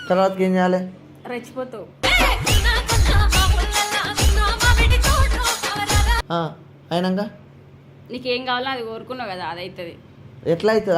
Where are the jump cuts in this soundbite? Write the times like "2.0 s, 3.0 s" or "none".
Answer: none